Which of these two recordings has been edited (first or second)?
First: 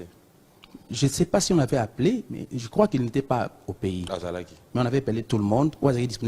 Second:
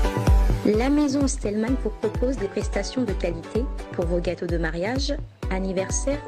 first